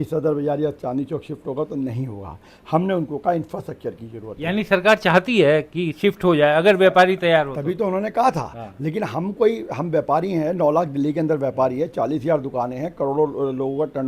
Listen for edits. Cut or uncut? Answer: uncut